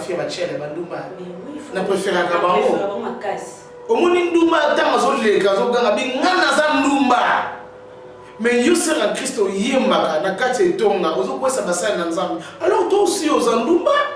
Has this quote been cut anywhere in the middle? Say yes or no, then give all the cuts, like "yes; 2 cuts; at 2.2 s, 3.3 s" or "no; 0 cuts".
no; 0 cuts